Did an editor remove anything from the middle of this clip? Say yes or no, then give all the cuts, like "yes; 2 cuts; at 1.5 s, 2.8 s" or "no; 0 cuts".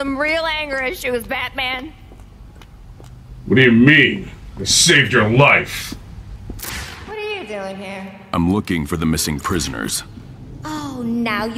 yes; 1 cut; at 6.3 s